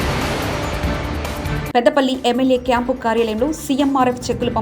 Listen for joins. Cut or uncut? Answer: cut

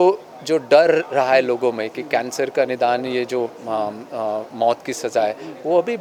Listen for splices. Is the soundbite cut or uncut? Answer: uncut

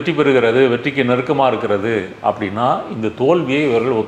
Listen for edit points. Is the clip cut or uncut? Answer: uncut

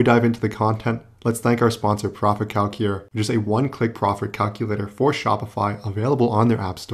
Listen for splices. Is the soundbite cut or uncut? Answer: uncut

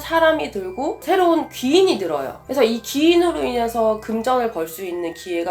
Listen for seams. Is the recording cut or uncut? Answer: uncut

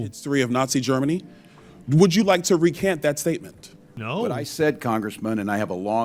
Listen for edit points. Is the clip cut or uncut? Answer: uncut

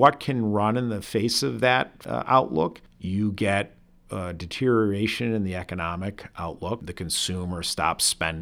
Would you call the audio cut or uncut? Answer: cut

